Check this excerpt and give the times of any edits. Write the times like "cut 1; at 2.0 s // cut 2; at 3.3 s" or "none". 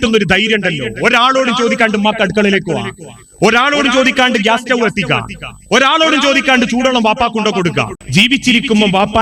cut 1; at 8.0 s